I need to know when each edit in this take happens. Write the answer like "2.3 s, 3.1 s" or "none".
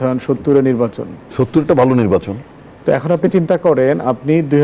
none